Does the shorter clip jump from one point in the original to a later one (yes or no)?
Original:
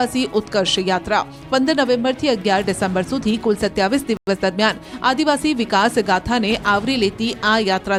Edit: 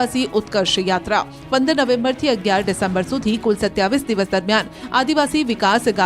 yes